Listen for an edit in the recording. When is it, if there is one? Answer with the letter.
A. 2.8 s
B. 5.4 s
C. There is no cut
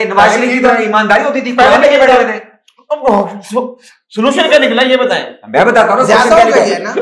C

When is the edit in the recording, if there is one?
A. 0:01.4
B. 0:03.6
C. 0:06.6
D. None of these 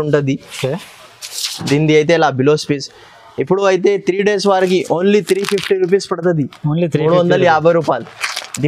D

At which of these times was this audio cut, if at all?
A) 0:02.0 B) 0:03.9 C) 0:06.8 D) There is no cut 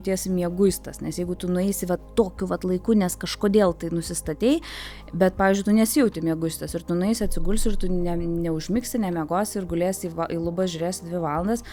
D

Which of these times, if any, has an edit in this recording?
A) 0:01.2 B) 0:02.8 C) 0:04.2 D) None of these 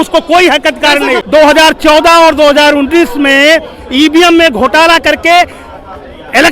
A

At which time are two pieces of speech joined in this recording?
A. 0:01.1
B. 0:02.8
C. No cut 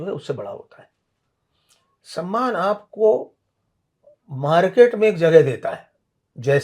C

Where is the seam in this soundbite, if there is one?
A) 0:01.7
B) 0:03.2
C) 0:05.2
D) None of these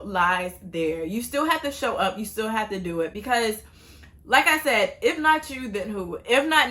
D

